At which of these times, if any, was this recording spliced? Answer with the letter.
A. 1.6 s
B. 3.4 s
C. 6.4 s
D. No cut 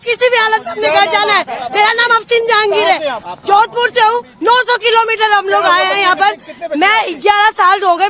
D